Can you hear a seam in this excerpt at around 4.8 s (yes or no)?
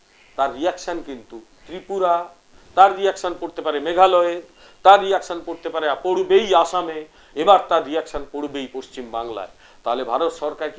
no